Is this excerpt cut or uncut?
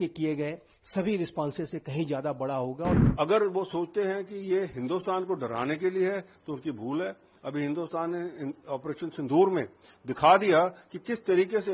cut